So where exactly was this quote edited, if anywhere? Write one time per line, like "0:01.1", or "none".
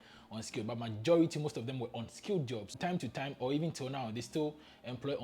0:02.7